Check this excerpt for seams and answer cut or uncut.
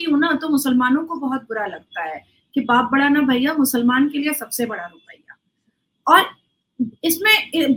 uncut